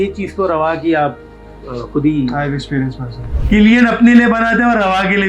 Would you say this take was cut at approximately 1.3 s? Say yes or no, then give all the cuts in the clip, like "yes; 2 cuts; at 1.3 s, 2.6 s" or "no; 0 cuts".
no; 1 cut; at 3.3 s